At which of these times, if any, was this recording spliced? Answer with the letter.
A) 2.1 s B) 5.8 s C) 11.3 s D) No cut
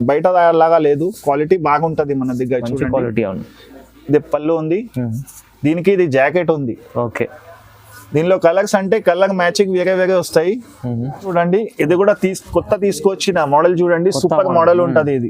C